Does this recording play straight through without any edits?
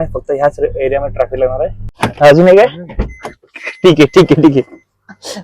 no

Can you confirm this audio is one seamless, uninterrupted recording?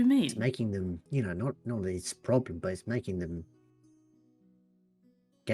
no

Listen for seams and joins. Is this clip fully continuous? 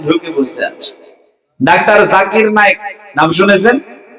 yes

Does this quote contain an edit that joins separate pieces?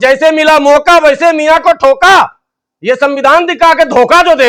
no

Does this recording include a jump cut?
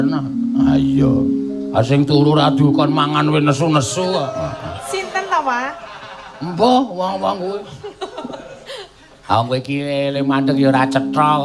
yes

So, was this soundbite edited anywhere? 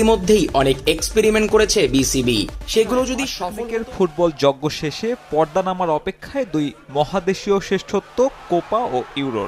yes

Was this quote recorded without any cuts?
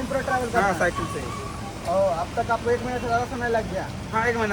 yes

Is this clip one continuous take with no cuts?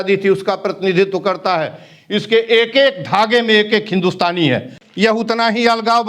no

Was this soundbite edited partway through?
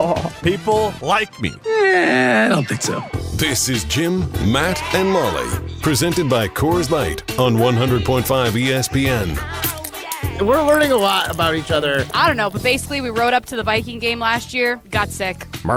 no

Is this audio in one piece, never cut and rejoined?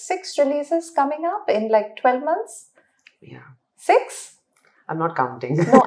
yes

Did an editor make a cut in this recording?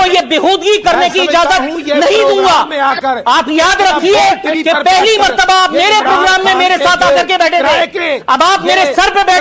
no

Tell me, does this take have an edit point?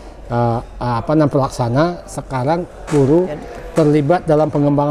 no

